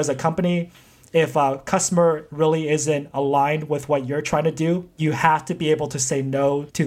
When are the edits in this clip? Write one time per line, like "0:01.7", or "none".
0:05.0